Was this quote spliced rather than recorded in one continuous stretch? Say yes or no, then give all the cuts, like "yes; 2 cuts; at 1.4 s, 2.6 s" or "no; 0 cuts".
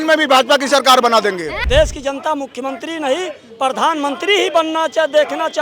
yes; 1 cut; at 1.5 s